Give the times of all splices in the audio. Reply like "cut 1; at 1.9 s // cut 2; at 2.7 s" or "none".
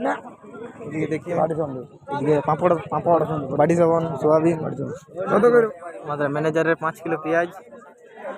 cut 1; at 1.3 s // cut 2; at 5.7 s